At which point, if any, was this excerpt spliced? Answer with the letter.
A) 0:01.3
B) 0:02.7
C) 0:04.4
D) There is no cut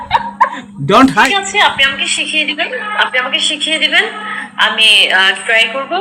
A